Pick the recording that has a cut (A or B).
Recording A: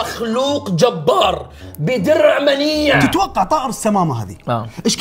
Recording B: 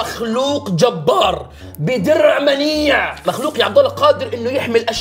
A